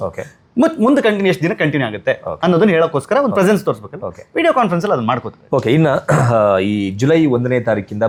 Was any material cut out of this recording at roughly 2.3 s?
no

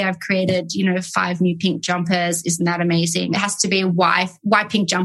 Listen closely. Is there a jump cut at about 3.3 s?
yes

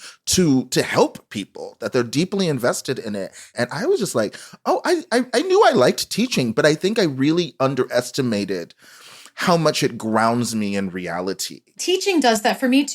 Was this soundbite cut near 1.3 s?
no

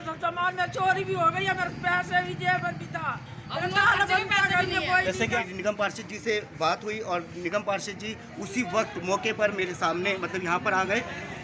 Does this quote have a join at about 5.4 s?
yes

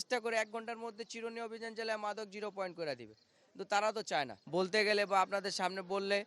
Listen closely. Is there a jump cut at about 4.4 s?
yes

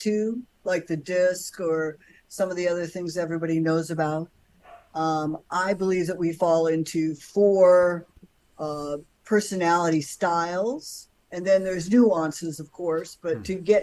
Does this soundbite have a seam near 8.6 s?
no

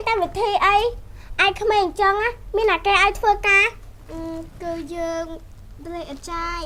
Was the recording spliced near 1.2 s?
no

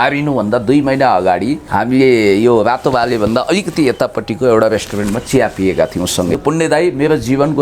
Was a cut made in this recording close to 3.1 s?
no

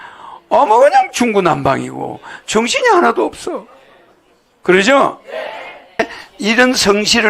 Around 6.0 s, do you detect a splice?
yes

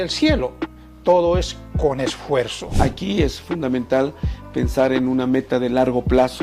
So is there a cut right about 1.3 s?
no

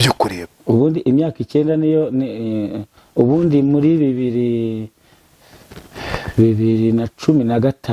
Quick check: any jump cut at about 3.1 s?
no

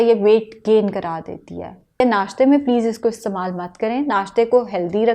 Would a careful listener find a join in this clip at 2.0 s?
yes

